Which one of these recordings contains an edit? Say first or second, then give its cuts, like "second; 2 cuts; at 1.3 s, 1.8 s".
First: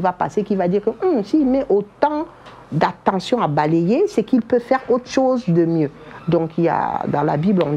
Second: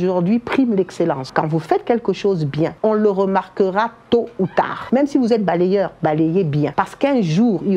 second; 4 cuts; at 1.2 s, 2.8 s, 4.8 s, 6.7 s